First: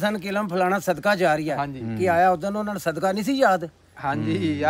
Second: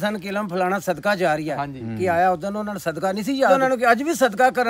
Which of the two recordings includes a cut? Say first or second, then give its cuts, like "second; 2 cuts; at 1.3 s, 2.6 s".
second; 1 cut; at 3.5 s